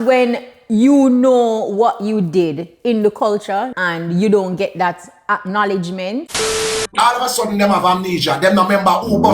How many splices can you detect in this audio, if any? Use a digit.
2